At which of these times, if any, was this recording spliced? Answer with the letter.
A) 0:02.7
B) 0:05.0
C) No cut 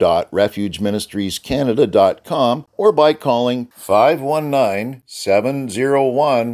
A